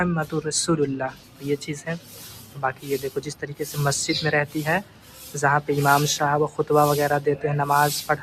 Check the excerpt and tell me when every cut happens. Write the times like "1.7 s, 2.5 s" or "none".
none